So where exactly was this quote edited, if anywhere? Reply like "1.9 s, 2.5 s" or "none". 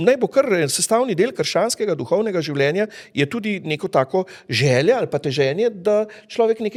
none